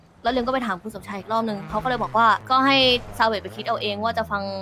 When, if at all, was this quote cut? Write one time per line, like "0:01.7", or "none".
0:02.4